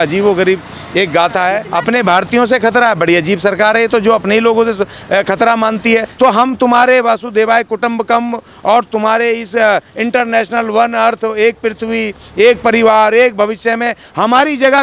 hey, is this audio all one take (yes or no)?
no